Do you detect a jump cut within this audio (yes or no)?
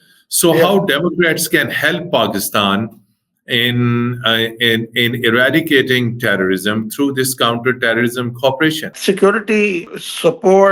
yes